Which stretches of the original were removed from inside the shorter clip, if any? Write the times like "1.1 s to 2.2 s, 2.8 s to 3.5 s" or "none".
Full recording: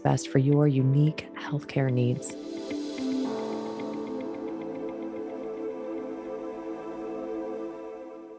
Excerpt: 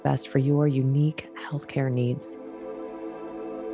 2.3 s to 5.9 s